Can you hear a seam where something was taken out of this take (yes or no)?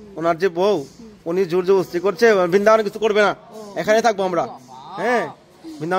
no